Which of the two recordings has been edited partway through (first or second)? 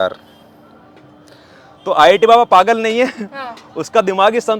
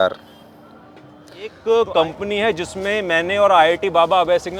second